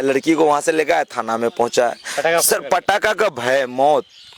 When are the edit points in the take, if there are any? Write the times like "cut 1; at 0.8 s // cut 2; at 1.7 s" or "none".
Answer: none

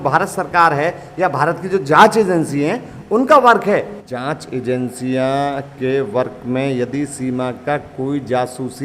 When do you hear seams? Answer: cut 1; at 4.0 s

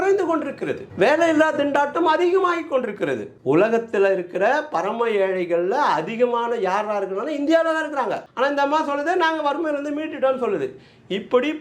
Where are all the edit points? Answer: cut 1; at 3.3 s

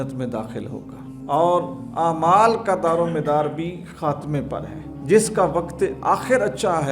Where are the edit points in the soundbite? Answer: none

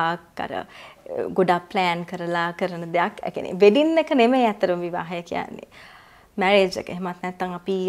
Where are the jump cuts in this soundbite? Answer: none

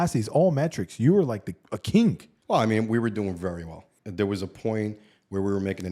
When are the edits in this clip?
cut 1; at 2.3 s // cut 2; at 3.8 s

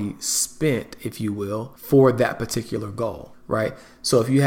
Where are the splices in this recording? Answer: cut 1; at 1.7 s // cut 2; at 3.3 s

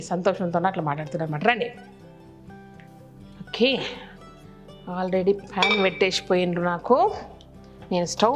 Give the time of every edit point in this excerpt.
none

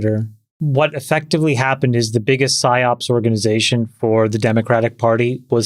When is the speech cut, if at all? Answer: none

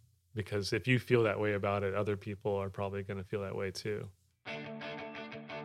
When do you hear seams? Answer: cut 1; at 4.4 s

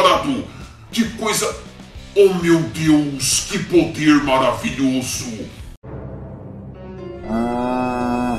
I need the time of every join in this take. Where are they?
none

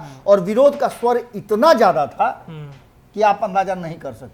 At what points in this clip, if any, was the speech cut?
none

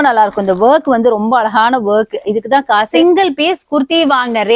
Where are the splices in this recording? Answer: cut 1; at 2.9 s

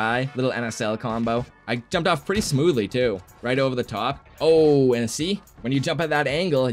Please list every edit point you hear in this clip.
cut 1; at 1.5 s // cut 2; at 4.2 s

